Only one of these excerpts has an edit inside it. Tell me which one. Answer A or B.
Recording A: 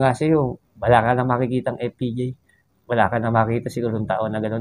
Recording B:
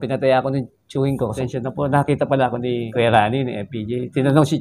B